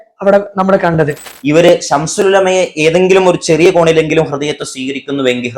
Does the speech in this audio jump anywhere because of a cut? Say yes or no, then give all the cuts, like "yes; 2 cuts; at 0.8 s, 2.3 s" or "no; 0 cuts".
yes; 1 cut; at 1.3 s